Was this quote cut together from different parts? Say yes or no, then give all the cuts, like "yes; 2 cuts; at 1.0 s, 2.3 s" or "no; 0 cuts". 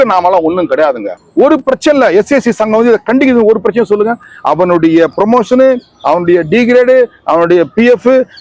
yes; 1 cut; at 1.1 s